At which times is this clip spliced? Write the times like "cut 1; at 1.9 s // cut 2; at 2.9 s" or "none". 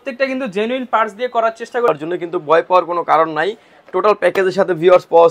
cut 1; at 1.9 s